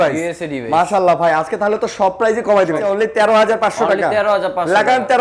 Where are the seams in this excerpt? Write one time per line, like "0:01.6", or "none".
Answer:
0:02.8